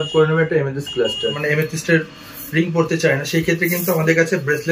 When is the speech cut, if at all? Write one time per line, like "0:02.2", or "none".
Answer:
0:01.4